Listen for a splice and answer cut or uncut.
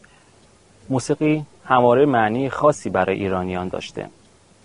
cut